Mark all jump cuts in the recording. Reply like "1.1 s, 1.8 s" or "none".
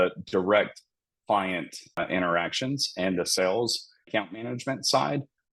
2.0 s